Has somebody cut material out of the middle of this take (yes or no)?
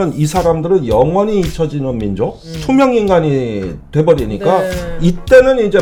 no